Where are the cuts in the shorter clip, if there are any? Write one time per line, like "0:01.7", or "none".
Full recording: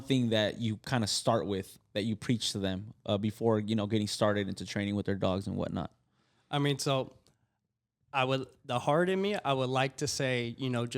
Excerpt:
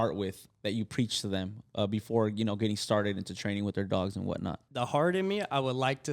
0:04.6